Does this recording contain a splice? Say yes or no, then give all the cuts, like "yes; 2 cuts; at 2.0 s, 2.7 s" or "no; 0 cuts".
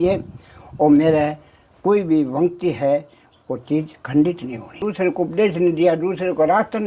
yes; 1 cut; at 4.8 s